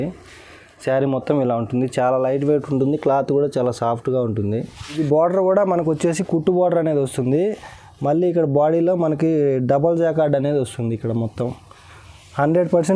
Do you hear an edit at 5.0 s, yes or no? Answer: yes